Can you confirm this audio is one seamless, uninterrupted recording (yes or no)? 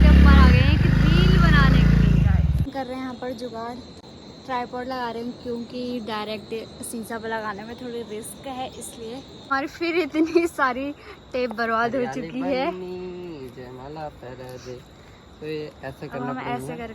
no